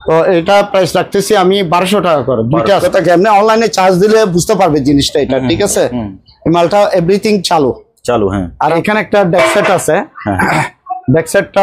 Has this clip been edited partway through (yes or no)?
yes